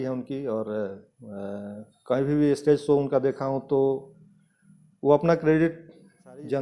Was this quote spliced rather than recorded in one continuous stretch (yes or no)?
no